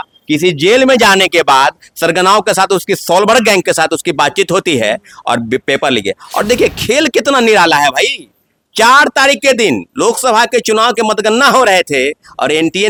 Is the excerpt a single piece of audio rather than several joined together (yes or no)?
yes